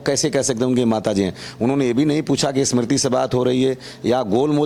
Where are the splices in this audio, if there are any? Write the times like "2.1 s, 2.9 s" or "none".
none